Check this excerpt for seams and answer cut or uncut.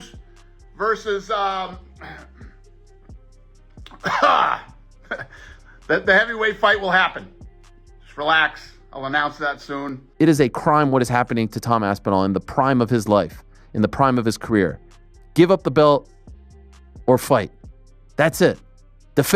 cut